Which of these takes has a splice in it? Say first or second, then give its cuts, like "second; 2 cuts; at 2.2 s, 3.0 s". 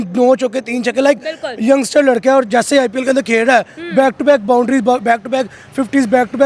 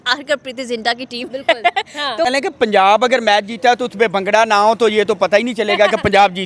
second; 1 cut; at 2.3 s